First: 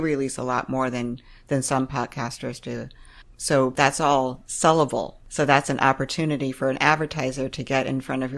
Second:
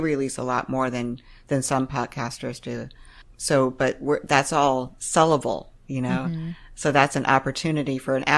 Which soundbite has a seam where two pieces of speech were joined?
first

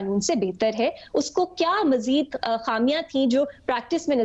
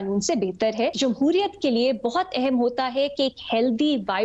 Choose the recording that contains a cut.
second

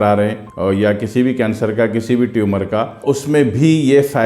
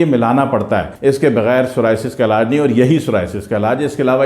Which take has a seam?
second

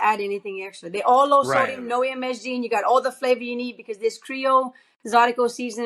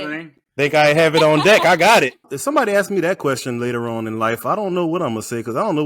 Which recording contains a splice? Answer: second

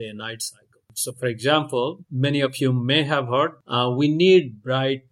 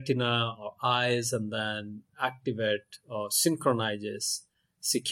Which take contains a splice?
first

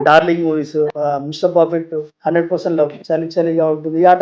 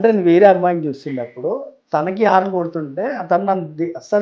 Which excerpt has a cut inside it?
first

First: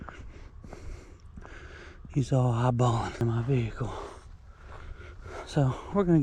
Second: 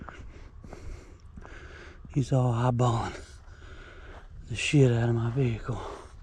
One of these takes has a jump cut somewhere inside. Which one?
first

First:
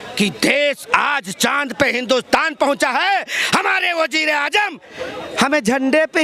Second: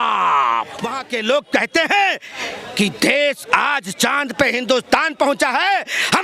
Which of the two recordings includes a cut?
second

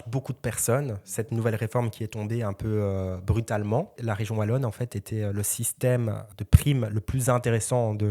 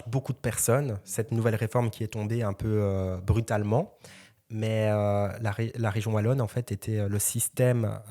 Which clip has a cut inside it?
first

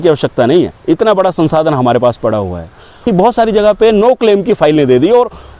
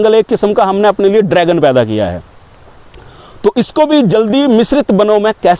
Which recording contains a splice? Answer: first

